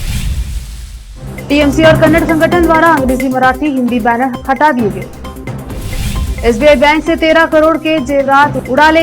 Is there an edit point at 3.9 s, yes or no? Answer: no